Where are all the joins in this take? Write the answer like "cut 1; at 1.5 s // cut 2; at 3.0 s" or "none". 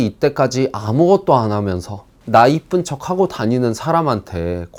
none